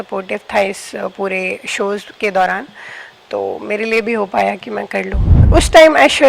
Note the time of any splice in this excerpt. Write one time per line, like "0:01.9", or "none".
0:05.4

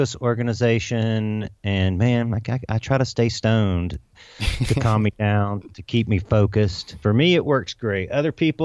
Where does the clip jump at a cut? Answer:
0:06.9

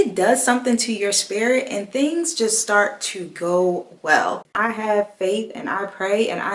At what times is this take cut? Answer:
0:04.5

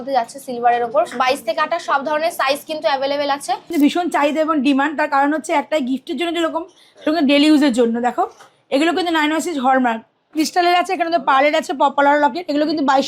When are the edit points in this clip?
0:03.7
0:10.3

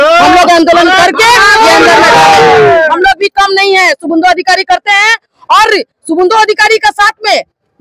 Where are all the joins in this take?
none

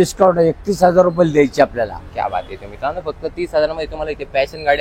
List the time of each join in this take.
none

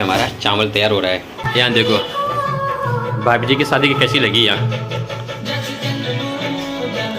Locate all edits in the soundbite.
0:01.4

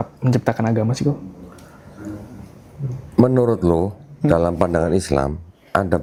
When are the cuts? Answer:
none

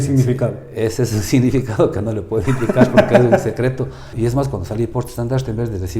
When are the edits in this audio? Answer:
0:04.1

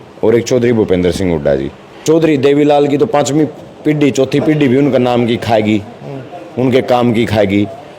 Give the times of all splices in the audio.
0:01.9

